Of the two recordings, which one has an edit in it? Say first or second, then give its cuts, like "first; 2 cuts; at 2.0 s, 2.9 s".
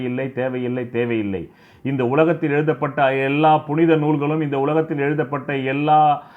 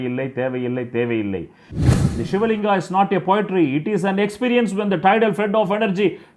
second; 1 cut; at 1.8 s